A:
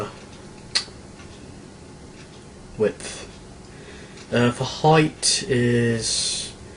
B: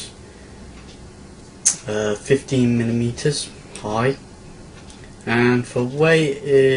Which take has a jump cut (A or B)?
A